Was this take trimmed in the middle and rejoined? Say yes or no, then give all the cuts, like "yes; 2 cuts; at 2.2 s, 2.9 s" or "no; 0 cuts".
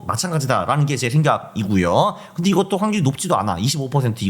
no; 0 cuts